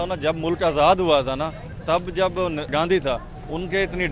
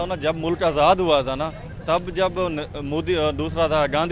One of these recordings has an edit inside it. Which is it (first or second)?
first